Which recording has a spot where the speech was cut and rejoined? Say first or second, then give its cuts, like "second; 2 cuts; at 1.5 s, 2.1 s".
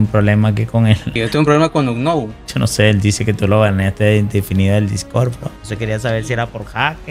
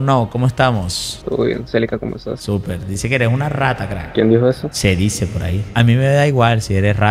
first; 3 cuts; at 1.1 s, 2.3 s, 5.6 s